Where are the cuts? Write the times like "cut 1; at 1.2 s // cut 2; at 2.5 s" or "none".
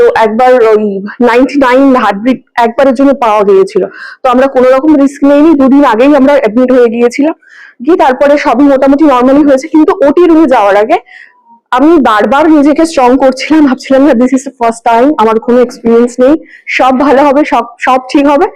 none

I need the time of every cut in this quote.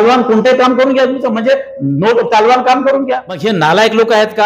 cut 1; at 3.3 s

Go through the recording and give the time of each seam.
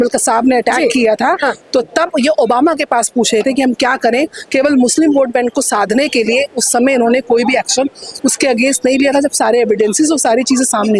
none

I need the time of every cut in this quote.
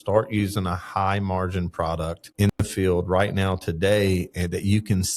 cut 1; at 2.2 s

